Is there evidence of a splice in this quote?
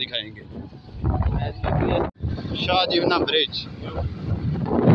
yes; 1 cut; at 2.3 s

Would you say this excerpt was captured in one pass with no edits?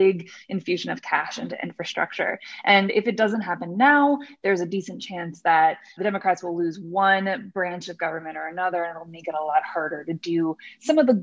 yes; 0 cuts

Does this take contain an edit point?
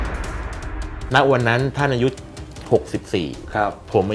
yes; 1 cut; at 0.9 s

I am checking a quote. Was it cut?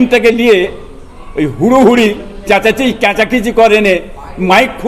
no; 0 cuts

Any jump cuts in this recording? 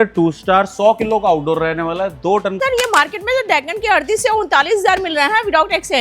yes; 1 cut; at 2.6 s

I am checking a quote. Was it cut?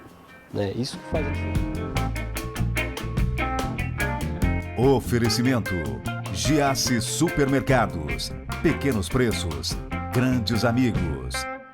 yes; 1 cut; at 1.0 s

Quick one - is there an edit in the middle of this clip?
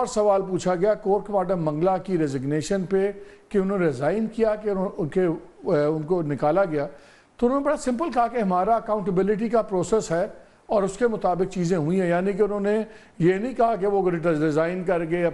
no; 0 cuts

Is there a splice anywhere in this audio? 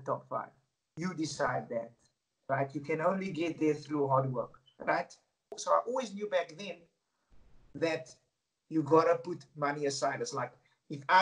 yes; 1 cut; at 5.6 s

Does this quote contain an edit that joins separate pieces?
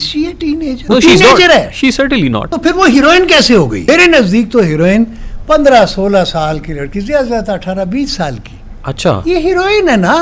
yes; 3 cuts; at 0.8 s, 2.5 s, 3.8 s

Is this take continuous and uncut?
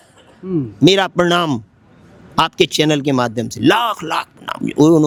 yes; 0 cuts

